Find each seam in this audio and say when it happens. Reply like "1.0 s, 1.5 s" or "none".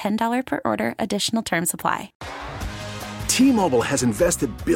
2.2 s